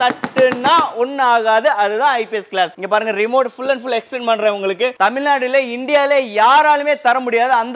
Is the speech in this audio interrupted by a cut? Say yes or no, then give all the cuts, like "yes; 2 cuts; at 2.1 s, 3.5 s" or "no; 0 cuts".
yes; 2 cuts; at 2.8 s, 4.9 s